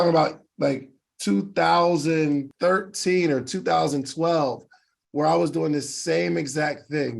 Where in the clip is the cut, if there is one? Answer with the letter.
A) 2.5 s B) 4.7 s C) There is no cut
A